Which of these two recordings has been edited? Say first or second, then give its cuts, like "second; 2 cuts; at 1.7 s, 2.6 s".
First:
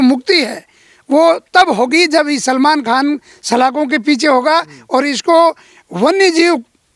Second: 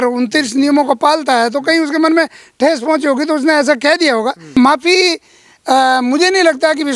second; 1 cut; at 4.5 s